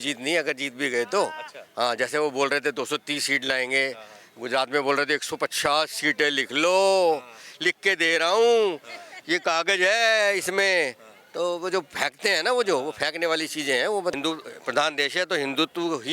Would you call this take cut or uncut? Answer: cut